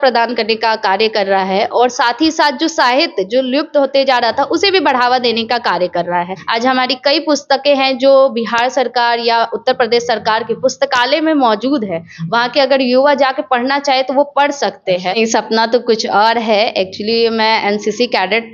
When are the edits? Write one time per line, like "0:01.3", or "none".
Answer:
0:06.4
0:15.2